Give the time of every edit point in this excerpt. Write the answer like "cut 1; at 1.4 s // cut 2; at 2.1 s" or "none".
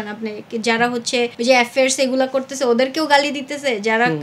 cut 1; at 1.3 s